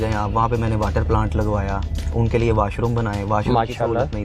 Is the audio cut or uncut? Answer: uncut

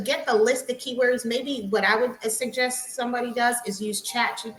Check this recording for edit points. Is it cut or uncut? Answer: uncut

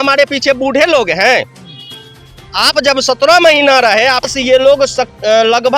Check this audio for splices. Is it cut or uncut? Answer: cut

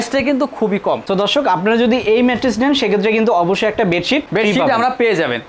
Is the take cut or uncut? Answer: cut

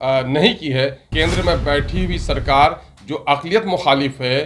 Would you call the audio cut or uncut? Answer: cut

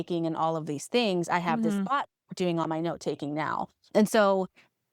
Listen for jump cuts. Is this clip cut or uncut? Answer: uncut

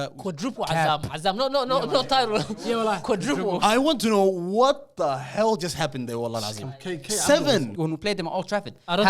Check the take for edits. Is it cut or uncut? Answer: cut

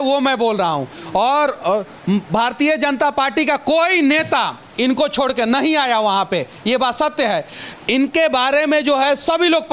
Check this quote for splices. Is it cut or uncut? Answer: uncut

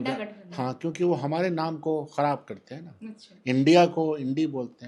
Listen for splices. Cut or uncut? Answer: uncut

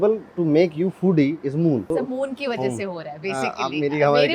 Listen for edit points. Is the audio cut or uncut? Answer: cut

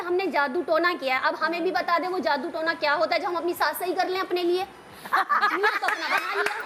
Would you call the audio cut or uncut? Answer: uncut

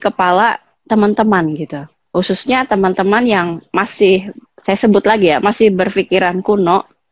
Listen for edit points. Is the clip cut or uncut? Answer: cut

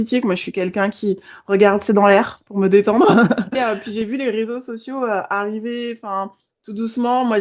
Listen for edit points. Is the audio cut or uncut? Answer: cut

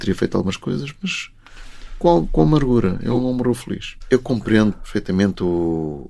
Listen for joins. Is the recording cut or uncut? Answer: cut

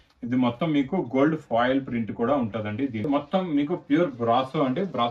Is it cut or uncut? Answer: cut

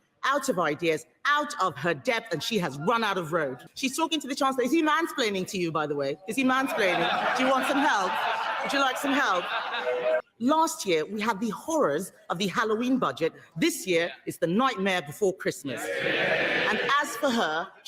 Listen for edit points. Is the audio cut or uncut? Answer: cut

